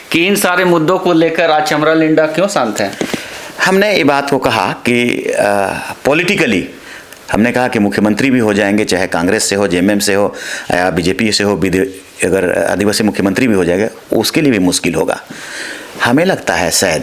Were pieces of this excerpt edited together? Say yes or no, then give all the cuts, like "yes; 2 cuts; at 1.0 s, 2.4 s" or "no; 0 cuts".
no; 0 cuts